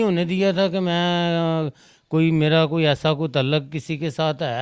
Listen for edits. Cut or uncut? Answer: uncut